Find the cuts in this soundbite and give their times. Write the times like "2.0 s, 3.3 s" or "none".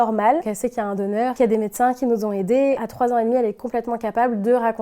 1.3 s, 2.8 s